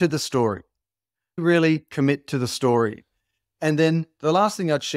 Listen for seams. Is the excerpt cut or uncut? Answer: uncut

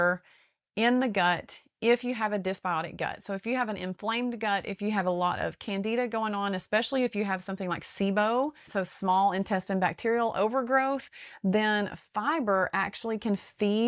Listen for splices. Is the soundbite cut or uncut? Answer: cut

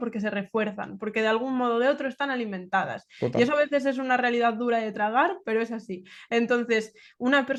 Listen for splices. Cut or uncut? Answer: uncut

